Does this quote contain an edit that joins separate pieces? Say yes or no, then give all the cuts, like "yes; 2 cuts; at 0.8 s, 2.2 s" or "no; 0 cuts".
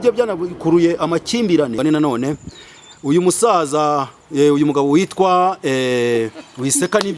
yes; 1 cut; at 1.8 s